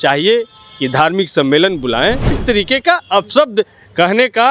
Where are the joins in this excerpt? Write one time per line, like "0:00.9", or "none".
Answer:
0:02.4